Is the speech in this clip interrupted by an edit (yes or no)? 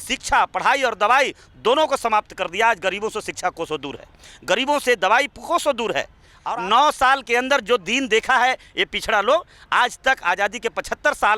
yes